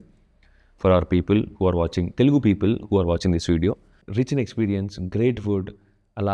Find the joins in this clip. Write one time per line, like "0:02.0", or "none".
none